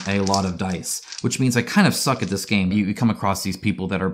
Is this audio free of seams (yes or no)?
no